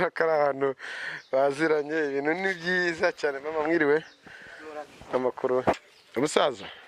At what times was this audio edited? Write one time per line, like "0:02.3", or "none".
0:05.8